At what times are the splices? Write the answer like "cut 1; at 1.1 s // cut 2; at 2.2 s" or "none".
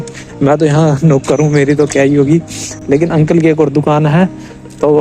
none